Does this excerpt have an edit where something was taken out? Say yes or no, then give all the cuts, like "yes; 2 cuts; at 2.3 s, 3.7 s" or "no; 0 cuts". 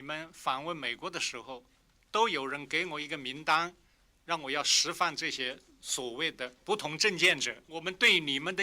yes; 2 cuts; at 6.6 s, 7.6 s